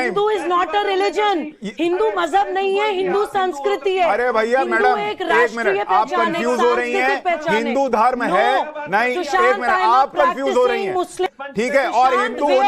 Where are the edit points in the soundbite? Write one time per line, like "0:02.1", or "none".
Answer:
0:11.4